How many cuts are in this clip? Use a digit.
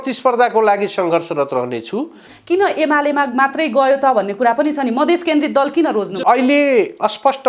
2